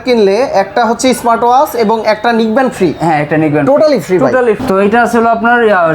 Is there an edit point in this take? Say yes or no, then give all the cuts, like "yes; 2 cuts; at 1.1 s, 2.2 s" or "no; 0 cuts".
no; 0 cuts